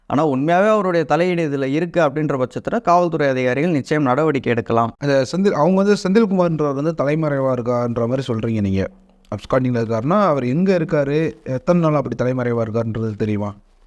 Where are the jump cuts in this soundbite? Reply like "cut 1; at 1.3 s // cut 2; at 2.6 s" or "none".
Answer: none